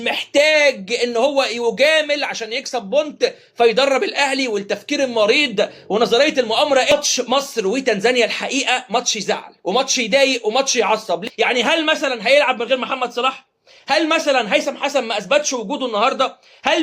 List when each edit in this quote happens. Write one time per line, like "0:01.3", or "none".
0:06.9
0:11.2